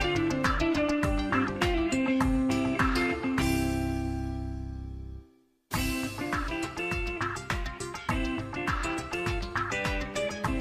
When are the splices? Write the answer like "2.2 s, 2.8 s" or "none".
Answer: 7.4 s